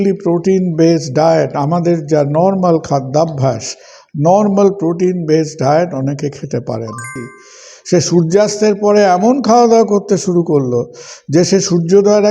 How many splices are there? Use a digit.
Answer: 1